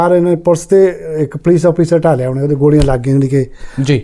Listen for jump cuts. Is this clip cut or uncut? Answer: uncut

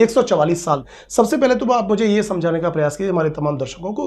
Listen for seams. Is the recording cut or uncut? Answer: uncut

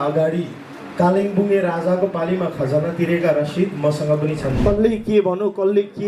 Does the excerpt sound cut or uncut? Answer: cut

